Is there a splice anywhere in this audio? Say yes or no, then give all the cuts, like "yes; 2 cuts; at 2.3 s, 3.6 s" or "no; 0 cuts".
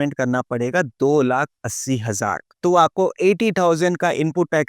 yes; 2 cuts; at 0.9 s, 2.4 s